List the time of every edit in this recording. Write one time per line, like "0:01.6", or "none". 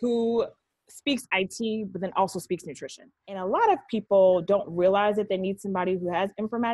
0:03.4